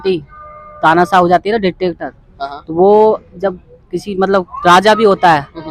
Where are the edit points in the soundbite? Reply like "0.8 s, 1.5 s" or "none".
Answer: none